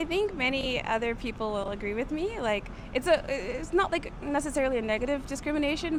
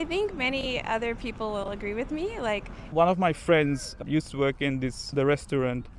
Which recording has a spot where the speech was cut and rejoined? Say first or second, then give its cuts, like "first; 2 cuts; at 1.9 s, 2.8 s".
second; 3 cuts; at 2.9 s, 4.0 s, 5.0 s